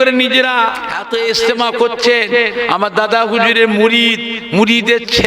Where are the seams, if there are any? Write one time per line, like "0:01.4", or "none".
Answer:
0:00.9